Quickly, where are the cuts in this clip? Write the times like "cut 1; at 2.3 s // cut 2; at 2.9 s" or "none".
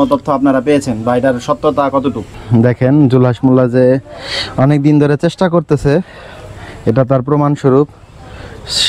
cut 1; at 2.4 s

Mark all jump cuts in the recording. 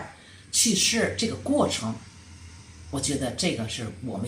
none

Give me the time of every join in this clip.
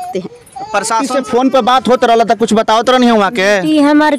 cut 1; at 1.1 s

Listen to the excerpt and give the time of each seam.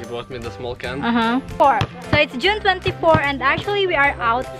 cut 1; at 1.5 s

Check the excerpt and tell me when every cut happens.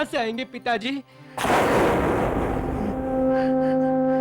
none

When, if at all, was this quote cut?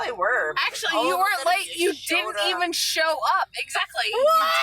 none

